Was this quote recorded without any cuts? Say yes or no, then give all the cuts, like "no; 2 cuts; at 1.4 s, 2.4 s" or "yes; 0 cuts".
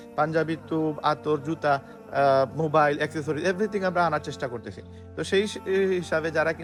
yes; 0 cuts